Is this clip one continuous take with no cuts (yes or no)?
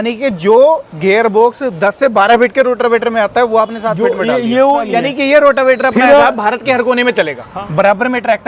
no